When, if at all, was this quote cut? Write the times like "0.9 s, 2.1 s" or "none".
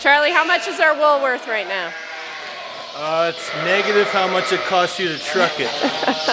none